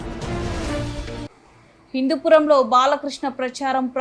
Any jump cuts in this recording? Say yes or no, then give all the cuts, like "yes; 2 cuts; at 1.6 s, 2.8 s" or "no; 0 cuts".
yes; 1 cut; at 1.3 s